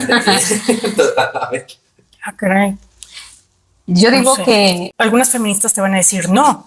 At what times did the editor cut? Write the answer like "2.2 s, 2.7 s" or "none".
4.9 s

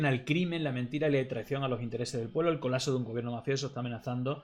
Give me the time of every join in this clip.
none

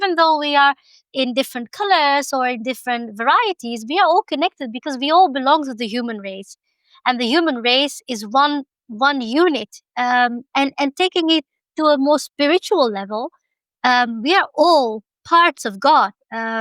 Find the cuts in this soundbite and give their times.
none

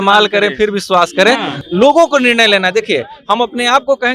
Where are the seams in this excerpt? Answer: 1.5 s

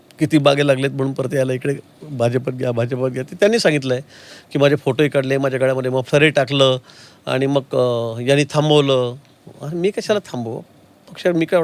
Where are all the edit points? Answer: none

